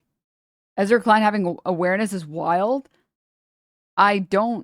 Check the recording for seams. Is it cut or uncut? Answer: uncut